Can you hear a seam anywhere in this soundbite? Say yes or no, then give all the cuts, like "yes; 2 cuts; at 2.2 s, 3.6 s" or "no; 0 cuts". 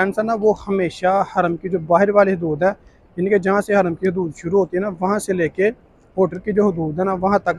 no; 0 cuts